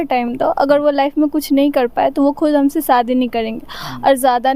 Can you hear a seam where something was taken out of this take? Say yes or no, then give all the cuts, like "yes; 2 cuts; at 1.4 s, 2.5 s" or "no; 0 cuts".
no; 0 cuts